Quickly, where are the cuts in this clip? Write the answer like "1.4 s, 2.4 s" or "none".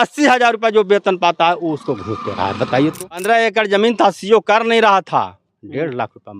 3.2 s